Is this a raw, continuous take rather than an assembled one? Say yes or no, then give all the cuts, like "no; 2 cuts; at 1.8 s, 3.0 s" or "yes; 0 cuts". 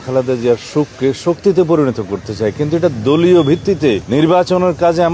yes; 0 cuts